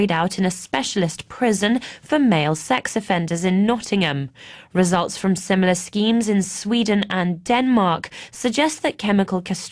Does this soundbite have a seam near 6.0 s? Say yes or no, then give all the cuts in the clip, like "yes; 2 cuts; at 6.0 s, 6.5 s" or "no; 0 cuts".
no; 1 cut; at 7.9 s